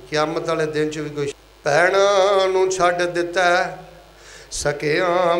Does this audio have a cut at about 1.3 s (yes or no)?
yes